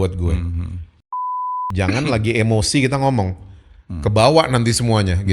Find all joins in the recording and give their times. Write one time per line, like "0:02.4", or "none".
0:01.4